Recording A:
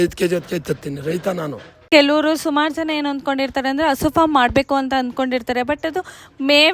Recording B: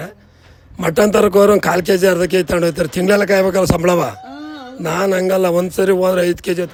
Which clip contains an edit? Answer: A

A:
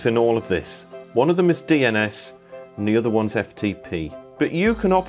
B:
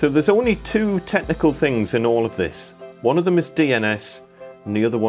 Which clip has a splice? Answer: A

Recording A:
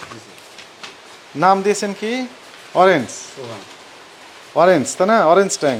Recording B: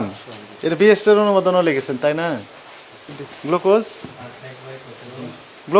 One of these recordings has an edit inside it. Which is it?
B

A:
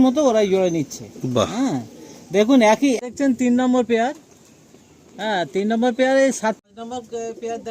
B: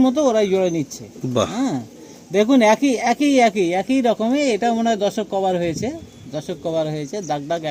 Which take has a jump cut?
A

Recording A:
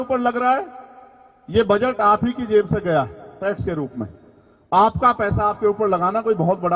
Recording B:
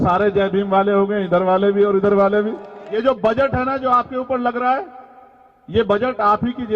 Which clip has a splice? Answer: B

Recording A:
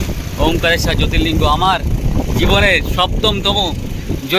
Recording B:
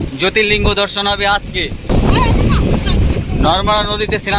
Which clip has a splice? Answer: B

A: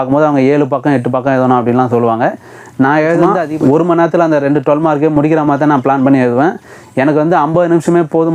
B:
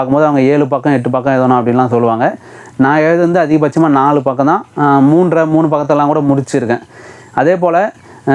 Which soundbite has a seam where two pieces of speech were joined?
A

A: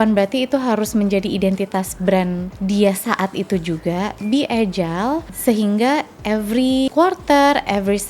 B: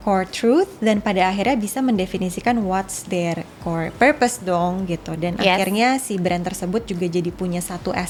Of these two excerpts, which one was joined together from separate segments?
A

